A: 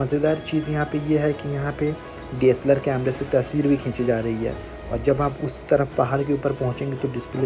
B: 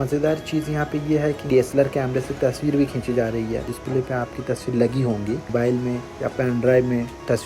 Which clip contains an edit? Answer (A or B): B